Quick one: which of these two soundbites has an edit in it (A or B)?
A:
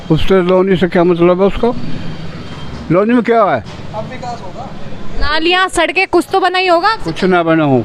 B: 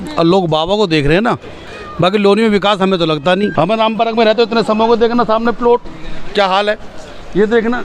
B